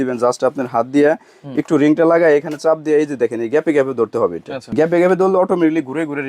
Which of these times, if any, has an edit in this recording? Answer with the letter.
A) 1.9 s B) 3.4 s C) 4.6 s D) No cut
C